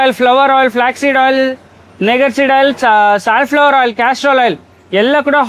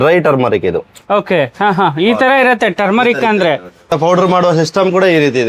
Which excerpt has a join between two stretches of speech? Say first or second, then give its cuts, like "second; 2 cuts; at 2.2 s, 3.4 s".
second; 1 cut; at 3.9 s